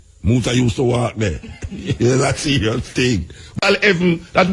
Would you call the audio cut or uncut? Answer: cut